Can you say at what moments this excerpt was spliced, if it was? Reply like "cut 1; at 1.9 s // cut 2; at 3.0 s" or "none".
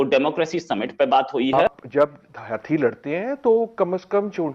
cut 1; at 1.4 s